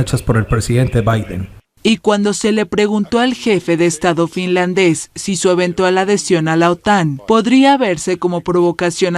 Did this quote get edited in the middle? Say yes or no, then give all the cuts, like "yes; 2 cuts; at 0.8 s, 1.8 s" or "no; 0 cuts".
yes; 1 cut; at 1.6 s